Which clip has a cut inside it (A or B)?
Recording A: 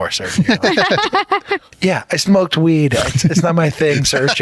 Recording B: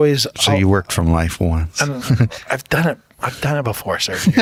A